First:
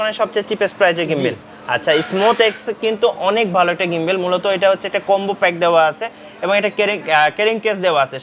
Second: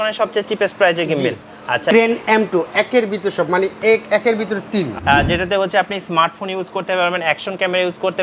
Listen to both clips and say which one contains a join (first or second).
second